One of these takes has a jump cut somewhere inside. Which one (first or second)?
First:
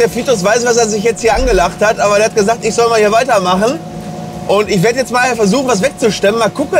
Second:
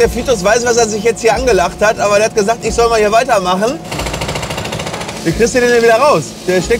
second